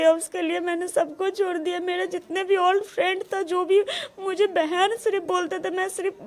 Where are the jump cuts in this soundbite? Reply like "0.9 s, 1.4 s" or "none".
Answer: none